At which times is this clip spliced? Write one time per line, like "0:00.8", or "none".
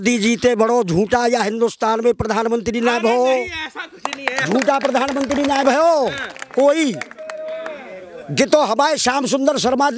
none

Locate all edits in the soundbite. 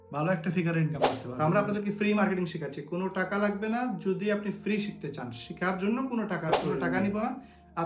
0:01.2
0:06.9

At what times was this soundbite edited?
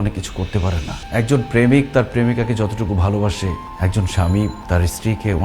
0:00.9
0:03.7
0:04.6

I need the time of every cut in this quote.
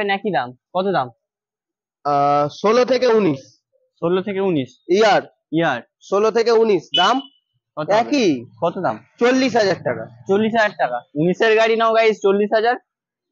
none

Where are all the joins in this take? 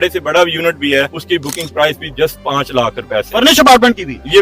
0:01.2

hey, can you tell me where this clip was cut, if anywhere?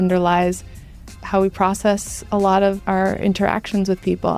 0:01.0
0:02.8

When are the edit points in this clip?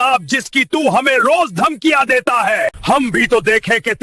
0:02.8

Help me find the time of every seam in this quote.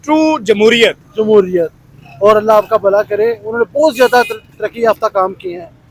none

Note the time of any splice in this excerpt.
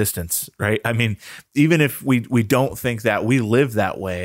none

